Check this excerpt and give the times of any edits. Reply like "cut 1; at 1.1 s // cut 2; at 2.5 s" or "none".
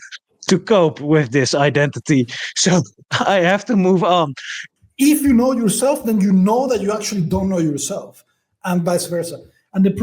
cut 1; at 4.6 s

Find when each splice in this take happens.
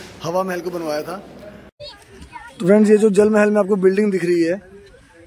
cut 1; at 1.9 s

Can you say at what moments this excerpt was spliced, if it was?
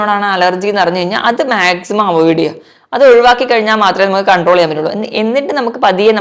none

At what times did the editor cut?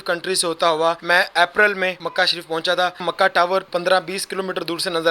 cut 1; at 1.0 s // cut 2; at 2.0 s // cut 3; at 3.2 s

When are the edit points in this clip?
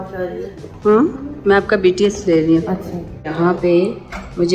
cut 1; at 3.3 s

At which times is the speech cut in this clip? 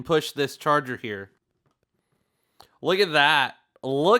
cut 1; at 1.4 s

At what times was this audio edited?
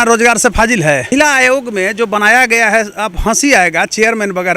cut 1; at 1.1 s

